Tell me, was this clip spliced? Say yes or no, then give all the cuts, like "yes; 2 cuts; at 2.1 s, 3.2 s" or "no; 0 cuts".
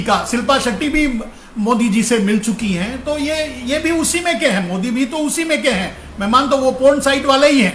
no; 0 cuts